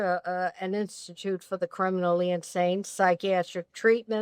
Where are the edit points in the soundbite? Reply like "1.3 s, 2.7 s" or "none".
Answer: none